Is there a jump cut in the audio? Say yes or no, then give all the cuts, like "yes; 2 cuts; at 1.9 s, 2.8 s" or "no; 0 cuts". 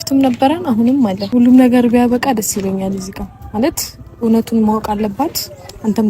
yes; 1 cut; at 1.2 s